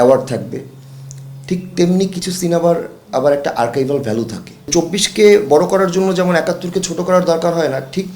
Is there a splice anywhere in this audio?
yes; 1 cut; at 4.7 s

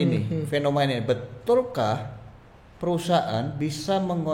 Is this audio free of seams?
yes; 0 cuts

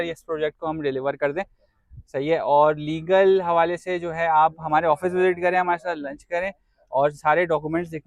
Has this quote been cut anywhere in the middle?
no; 0 cuts

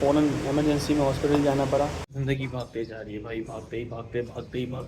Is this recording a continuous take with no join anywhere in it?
no; 1 cut; at 2.1 s

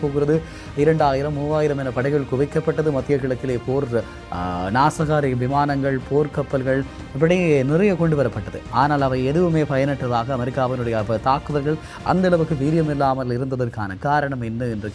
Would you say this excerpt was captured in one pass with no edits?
yes; 0 cuts

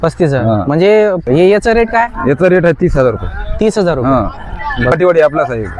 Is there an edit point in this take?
yes; 2 cuts; at 1.2 s, 4.9 s

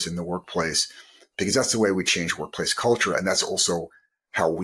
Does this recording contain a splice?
no; 0 cuts

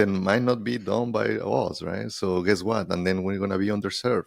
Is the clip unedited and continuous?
yes; 0 cuts

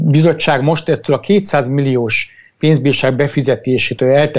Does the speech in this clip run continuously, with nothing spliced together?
yes; 0 cuts

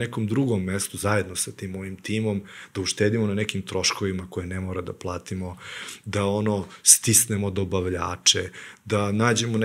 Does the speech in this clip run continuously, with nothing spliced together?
yes; 0 cuts

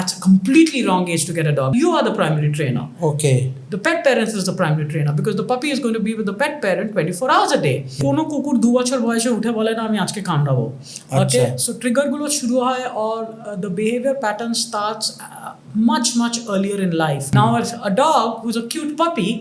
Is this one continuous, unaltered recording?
no; 3 cuts; at 1.7 s, 8.0 s, 17.3 s

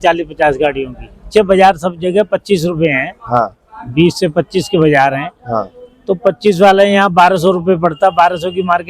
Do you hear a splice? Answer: yes; 1 cut; at 1.2 s

